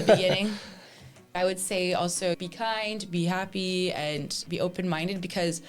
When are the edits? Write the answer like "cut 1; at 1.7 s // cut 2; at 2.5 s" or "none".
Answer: cut 1; at 1.3 s // cut 2; at 2.4 s // cut 3; at 4.4 s